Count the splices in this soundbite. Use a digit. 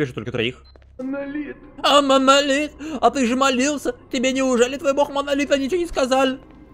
1